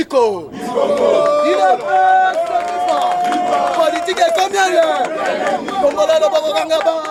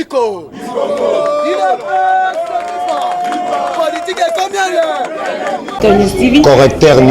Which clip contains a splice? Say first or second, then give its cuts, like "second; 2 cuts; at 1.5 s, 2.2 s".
second; 1 cut; at 5.8 s